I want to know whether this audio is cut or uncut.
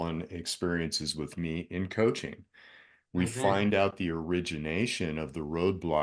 uncut